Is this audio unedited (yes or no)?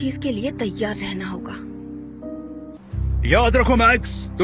no